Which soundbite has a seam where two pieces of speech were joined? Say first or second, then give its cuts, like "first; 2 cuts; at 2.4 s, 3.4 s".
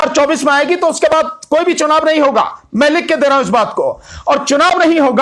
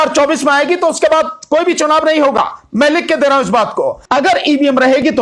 second; 1 cut; at 4.0 s